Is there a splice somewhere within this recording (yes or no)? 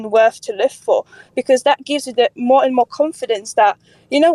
no